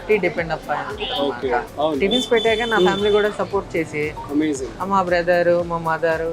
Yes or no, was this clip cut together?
yes